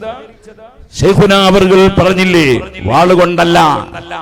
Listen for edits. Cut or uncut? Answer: uncut